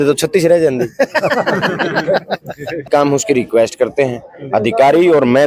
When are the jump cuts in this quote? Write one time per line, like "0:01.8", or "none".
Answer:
0:02.9

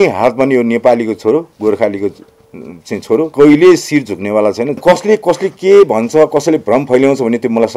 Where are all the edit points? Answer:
0:03.3
0:04.8

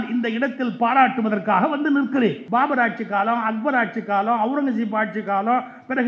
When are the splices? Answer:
0:02.4

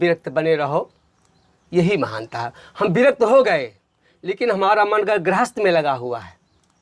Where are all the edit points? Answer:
none

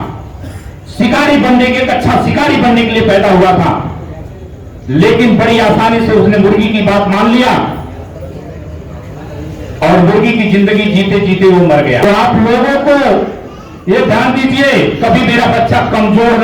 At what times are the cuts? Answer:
0:12.1

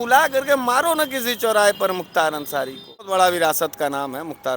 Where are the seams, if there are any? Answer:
0:03.1

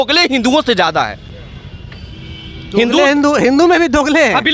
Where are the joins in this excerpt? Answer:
none

